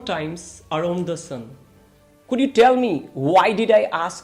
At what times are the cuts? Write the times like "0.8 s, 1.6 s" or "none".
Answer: none